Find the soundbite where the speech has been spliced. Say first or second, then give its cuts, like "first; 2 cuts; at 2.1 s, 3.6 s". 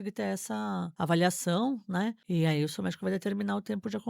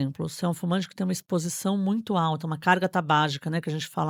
first; 2 cuts; at 0.9 s, 2.2 s